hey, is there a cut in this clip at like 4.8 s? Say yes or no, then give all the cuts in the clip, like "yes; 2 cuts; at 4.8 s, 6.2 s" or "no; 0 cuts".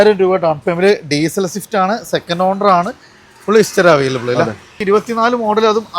yes; 1 cut; at 4.8 s